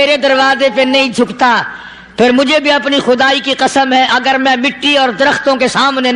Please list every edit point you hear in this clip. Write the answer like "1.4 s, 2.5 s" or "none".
none